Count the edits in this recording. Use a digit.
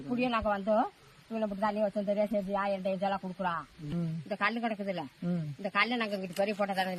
1